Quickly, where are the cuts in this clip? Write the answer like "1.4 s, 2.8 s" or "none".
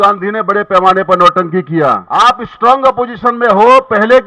2.0 s